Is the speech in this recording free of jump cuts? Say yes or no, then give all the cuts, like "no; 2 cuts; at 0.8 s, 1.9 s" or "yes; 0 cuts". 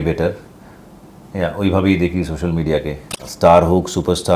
no; 1 cut; at 3.3 s